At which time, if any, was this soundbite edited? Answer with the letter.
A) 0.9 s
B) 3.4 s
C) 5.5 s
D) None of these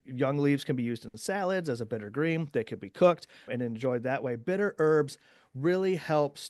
D